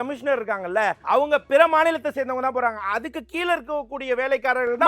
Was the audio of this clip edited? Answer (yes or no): yes